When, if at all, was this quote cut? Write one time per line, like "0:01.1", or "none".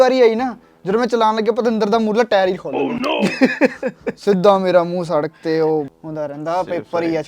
0:06.0